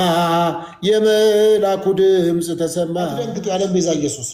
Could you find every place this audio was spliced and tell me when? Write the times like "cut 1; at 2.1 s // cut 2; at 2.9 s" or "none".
cut 1; at 3.3 s